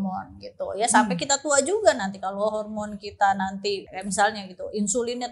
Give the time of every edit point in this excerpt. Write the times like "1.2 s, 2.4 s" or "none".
3.8 s